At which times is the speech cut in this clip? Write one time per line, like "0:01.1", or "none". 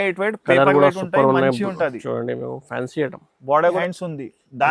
0:03.8